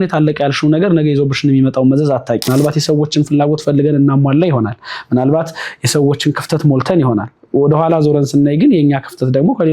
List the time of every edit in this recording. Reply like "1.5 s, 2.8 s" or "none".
2.5 s